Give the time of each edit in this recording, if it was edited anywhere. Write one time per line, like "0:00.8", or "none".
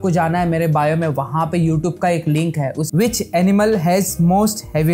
0:02.8